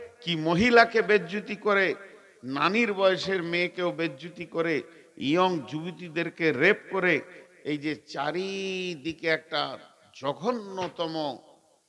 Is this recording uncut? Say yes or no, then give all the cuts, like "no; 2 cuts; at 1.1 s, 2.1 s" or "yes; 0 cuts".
yes; 0 cuts